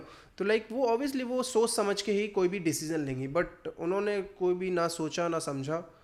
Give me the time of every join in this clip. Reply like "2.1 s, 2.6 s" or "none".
none